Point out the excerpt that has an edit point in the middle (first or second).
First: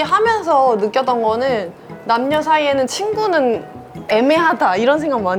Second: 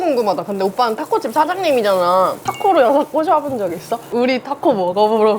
second